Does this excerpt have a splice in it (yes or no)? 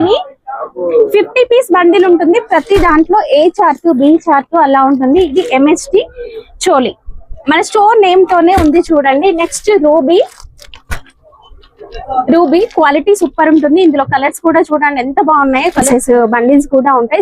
yes